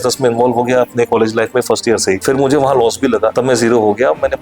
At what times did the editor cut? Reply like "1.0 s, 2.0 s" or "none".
2.2 s, 3.3 s